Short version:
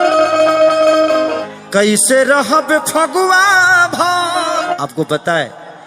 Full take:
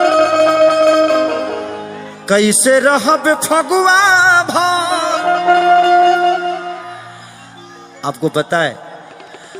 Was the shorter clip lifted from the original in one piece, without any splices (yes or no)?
no